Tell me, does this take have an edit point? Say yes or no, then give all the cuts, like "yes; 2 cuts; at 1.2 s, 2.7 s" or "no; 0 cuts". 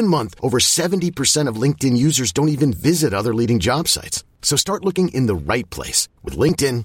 no; 0 cuts